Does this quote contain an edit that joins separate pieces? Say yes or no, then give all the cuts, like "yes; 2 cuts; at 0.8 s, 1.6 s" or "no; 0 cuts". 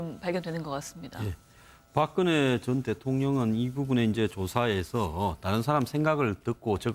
yes; 1 cut; at 4.7 s